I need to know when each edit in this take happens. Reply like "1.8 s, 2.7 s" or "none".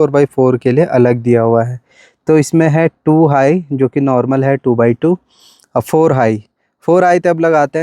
none